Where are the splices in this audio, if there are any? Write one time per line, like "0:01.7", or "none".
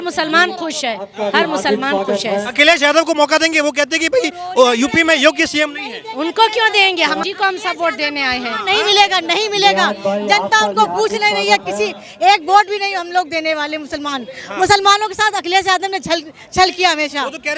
0:07.2